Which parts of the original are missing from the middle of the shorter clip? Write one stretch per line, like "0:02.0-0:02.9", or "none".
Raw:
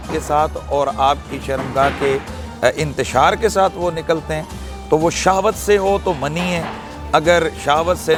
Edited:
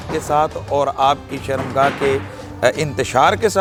none